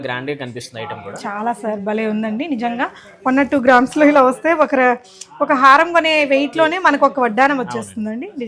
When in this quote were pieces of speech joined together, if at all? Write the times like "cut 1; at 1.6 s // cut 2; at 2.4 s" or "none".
none